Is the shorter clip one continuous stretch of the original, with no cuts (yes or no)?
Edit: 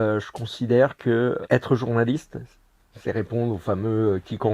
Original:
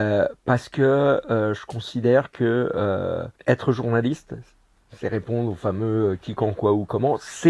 no